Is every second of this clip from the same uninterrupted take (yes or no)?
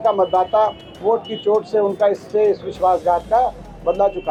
yes